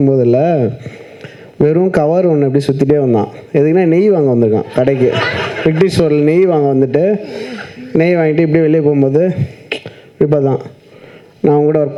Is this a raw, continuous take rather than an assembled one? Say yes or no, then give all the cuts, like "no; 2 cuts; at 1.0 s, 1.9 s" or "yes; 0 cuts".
yes; 0 cuts